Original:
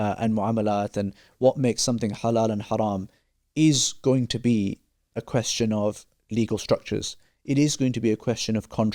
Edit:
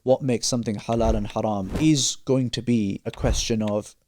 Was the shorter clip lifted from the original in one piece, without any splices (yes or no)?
no